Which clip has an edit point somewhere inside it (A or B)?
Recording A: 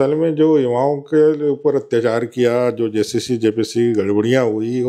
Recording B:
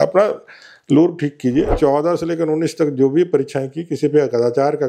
B